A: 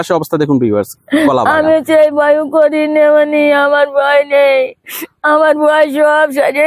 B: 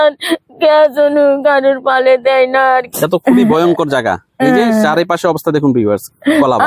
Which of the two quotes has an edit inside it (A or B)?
B